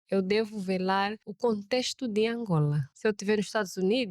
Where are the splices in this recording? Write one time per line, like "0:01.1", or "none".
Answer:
0:01.3
0:02.9